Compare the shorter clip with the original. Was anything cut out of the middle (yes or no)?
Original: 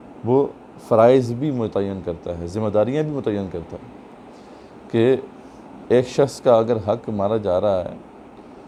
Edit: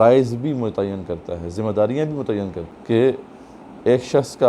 yes